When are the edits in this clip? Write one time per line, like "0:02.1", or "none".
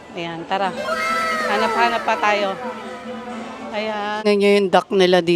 0:04.2